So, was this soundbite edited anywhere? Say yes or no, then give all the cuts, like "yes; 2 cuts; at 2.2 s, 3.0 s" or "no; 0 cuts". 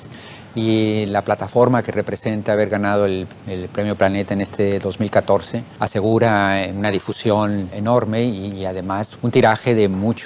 yes; 1 cut; at 2.4 s